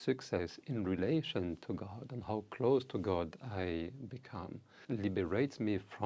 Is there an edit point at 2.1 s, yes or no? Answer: no